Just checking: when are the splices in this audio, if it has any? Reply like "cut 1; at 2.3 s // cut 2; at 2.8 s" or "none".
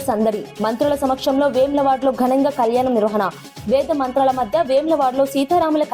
none